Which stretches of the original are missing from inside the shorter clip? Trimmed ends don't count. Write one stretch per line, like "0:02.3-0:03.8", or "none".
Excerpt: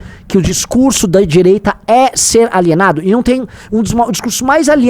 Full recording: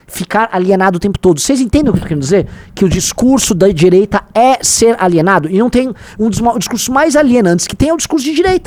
none

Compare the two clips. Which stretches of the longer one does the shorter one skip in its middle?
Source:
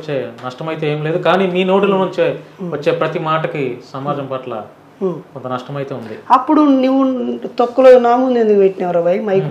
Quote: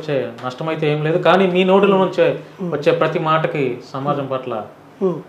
none

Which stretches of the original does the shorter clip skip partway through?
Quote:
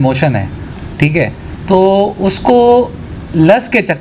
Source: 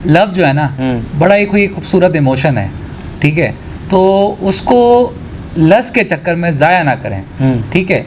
none

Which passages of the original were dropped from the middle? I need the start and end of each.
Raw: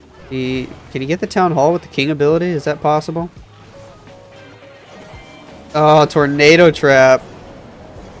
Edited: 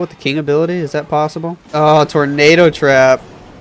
0:03.3-0:05.6

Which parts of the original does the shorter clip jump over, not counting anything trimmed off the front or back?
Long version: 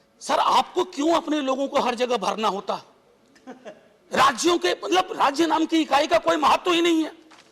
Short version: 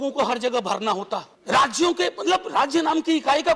0:02.9-0:04.0

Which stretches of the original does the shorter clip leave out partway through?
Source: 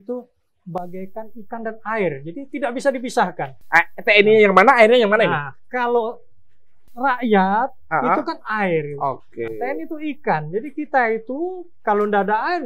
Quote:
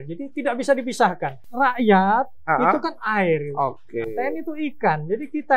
0:03.5-0:06.8

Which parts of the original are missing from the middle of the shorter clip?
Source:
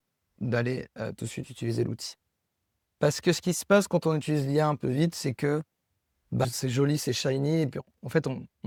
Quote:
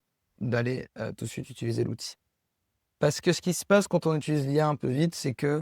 none

